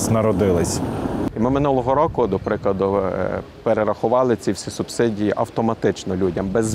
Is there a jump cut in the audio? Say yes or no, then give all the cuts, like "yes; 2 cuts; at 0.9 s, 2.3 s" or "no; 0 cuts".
yes; 1 cut; at 1.3 s